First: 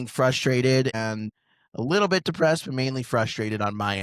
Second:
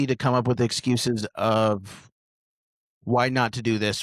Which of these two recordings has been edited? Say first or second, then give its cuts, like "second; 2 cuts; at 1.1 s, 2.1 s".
first; 1 cut; at 1.0 s